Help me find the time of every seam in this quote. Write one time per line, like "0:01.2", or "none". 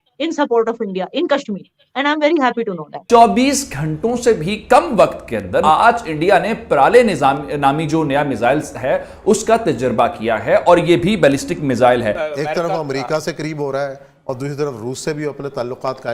0:03.0
0:05.6
0:12.1